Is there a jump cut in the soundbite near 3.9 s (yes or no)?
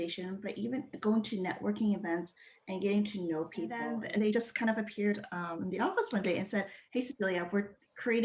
yes